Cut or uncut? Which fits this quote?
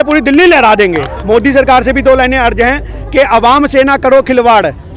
cut